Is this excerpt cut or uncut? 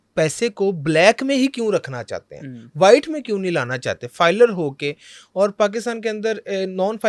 uncut